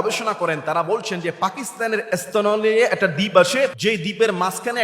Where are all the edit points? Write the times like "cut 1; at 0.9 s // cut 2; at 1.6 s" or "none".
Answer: cut 1; at 3.8 s